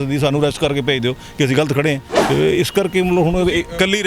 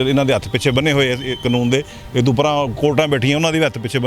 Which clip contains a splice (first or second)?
first